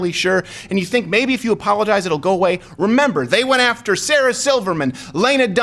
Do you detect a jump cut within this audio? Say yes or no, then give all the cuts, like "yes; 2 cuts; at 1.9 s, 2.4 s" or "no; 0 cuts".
no; 0 cuts